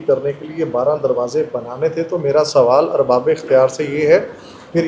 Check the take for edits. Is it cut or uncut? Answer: uncut